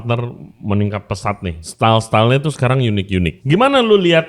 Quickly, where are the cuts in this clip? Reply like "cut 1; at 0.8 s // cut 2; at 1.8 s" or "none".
cut 1; at 1.6 s // cut 2; at 3.4 s

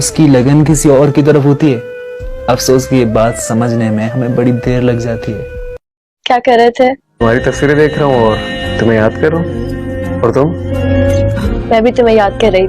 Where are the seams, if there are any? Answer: cut 1; at 6.1 s

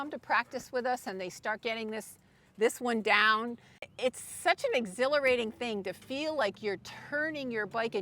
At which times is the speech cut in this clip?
cut 1; at 3.9 s

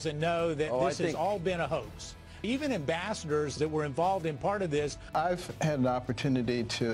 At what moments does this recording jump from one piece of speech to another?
cut 1; at 2.4 s // cut 2; at 3.4 s // cut 3; at 5.1 s

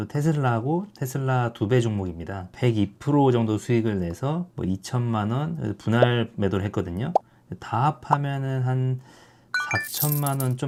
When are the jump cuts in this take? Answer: none

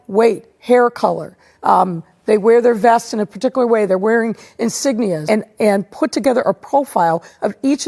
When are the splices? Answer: cut 1; at 5.2 s

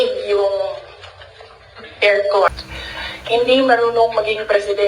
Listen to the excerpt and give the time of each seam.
cut 1; at 2.5 s

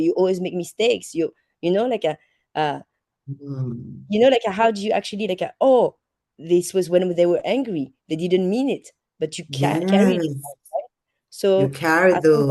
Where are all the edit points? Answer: none

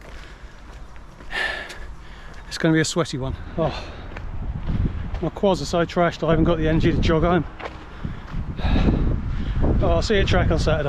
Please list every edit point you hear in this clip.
cut 1; at 3.4 s

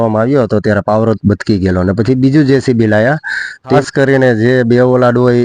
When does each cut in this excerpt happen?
cut 1; at 3.8 s

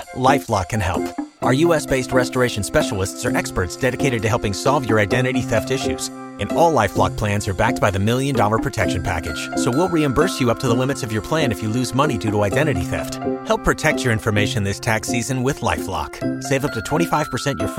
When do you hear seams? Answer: none

